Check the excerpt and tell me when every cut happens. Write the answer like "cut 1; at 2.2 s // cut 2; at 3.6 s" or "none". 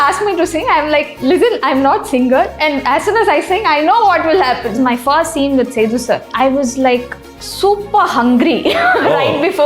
cut 1; at 1.1 s // cut 2; at 4.8 s // cut 3; at 6.3 s